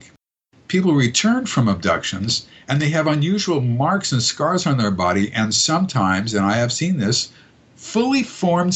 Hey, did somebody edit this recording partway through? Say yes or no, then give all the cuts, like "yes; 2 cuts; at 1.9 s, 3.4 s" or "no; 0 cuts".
no; 0 cuts